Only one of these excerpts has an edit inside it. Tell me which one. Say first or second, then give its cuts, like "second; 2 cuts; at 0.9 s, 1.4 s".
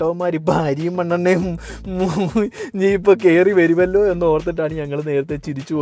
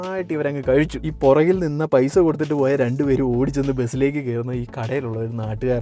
second; 1 cut; at 1.0 s